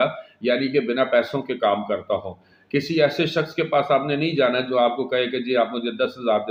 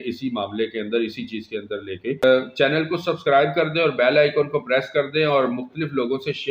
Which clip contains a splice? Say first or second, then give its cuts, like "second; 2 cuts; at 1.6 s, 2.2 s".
second; 1 cut; at 2.2 s